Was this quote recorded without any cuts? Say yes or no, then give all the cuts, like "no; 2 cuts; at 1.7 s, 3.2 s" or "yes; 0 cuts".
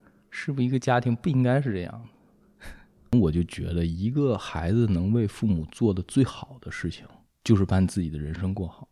no; 1 cut; at 3.1 s